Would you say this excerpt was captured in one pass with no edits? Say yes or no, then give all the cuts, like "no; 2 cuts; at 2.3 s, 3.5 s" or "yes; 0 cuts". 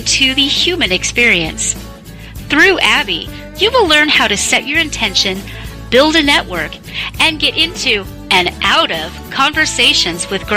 yes; 0 cuts